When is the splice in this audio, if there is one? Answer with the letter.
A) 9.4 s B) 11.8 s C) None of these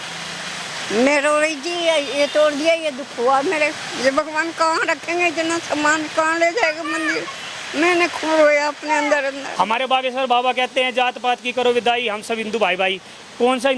A